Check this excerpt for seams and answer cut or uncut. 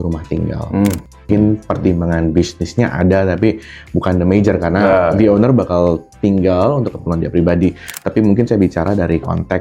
uncut